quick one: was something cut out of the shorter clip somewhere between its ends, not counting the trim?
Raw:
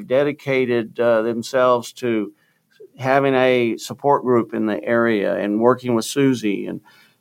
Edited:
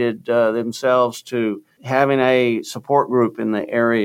yes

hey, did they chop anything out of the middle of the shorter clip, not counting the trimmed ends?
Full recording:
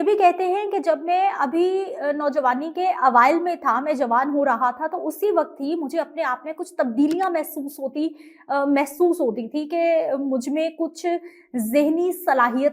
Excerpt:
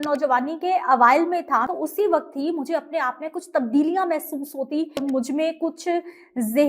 yes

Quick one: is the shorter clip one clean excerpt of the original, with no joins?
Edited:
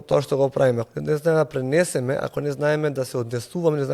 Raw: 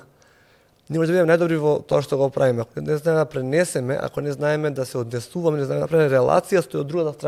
yes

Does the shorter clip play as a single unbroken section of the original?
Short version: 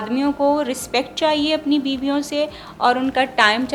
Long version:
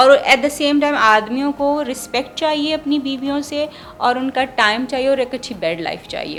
yes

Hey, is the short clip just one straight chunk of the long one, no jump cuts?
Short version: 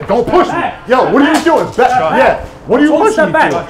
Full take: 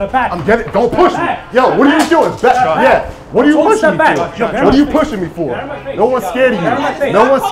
yes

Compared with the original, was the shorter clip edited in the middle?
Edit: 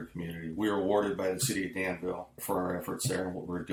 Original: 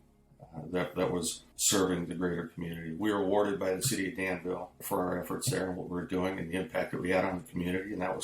no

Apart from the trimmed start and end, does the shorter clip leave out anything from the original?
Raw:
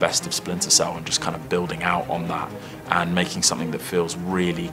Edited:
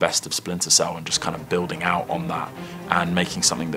no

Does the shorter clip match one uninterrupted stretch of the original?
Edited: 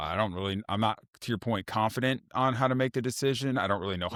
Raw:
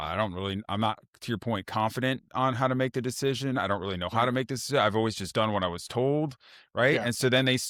yes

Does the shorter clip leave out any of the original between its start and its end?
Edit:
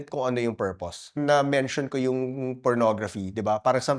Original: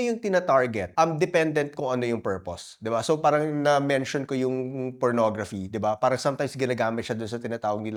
yes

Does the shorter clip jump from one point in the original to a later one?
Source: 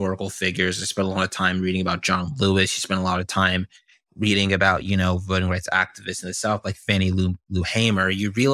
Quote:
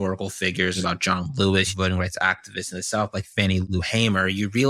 yes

